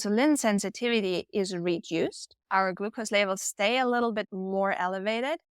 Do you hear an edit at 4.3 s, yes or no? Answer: yes